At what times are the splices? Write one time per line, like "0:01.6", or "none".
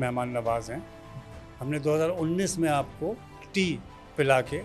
0:03.3